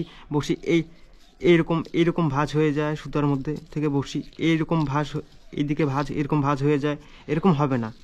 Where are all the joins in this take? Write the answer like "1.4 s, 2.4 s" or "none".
none